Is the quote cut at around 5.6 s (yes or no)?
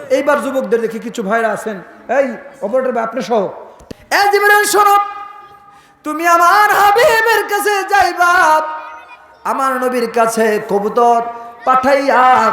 no